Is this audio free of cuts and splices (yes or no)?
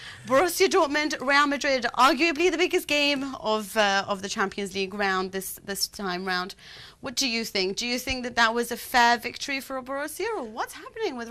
yes